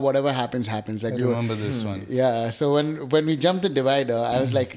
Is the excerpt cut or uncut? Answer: uncut